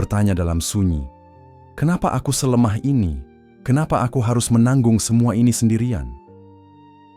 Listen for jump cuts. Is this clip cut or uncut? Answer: cut